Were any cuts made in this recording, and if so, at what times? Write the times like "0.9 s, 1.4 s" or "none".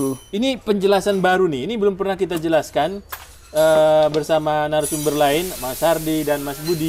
none